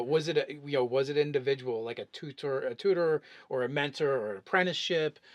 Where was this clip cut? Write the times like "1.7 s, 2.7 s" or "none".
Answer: 2.3 s